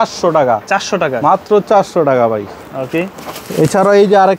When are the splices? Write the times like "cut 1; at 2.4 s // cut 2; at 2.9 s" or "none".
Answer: none